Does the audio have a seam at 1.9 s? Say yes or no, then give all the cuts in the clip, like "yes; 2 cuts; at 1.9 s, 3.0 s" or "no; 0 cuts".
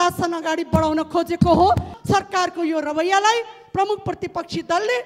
yes; 1 cut; at 1.9 s